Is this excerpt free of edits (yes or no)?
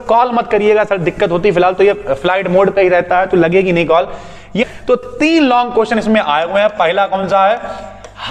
no